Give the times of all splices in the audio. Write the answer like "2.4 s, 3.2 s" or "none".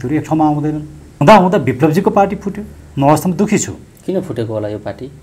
1.1 s